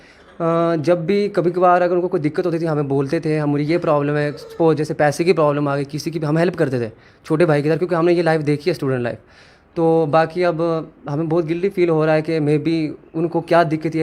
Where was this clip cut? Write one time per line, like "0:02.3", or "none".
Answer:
none